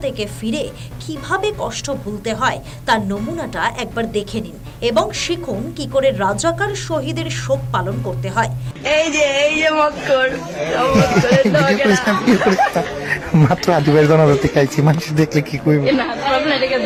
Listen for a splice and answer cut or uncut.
uncut